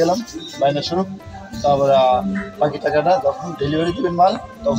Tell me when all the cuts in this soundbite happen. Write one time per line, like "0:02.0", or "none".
none